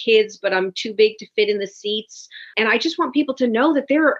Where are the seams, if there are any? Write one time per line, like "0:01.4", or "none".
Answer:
0:02.5